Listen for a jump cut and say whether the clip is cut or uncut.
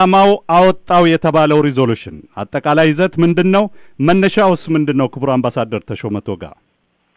cut